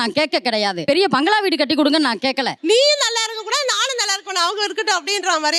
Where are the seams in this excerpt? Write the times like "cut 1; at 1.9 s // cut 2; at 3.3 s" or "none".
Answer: none